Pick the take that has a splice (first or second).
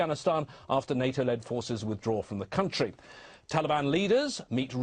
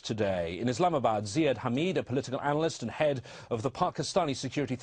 second